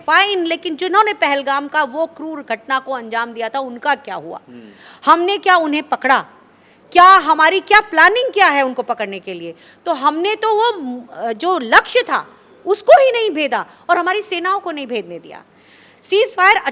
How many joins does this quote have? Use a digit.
0